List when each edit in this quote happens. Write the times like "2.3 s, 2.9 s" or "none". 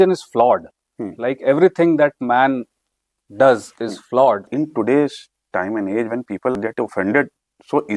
4.5 s